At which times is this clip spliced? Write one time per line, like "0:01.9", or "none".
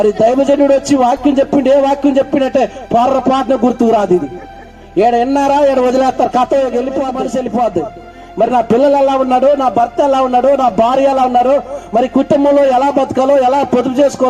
0:07.1

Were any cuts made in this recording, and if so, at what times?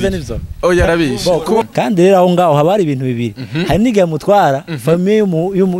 0:01.6

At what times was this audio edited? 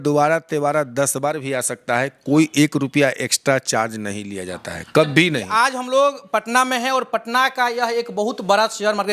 0:05.5

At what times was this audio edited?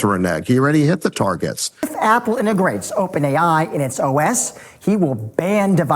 0:01.9

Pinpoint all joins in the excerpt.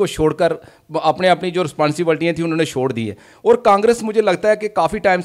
none

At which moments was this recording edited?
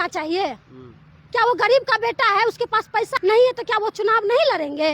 0:03.1

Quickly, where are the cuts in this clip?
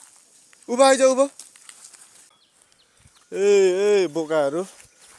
0:02.4

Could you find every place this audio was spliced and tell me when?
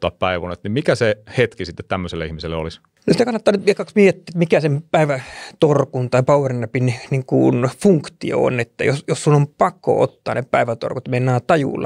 0:02.9

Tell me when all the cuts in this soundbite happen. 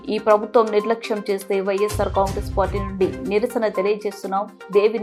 none

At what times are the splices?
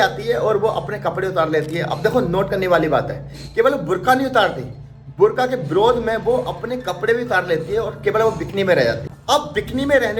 none

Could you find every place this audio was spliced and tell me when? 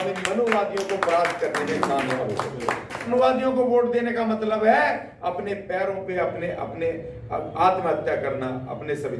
0:03.1

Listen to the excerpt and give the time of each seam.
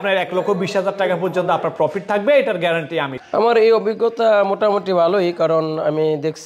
0:03.2

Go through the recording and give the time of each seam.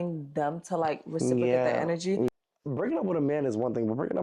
0:02.3

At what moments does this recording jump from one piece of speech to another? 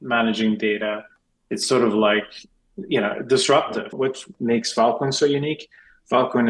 0:04.0

